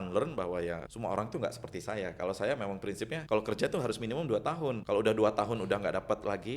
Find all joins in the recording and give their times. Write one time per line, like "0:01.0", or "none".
0:00.9
0:03.2
0:04.8